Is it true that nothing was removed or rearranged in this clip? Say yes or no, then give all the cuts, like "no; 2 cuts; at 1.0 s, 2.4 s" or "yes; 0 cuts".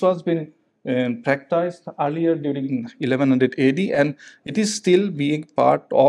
yes; 0 cuts